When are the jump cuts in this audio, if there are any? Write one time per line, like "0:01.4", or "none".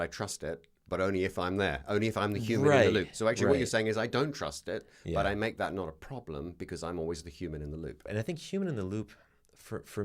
0:08.0